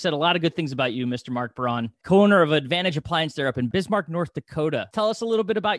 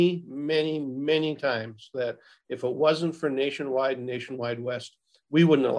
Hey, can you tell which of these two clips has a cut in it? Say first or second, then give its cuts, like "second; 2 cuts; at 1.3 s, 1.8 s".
first; 3 cuts; at 2.0 s, 3.7 s, 4.9 s